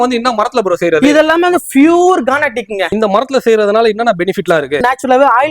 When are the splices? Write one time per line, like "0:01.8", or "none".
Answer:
0:02.9
0:04.8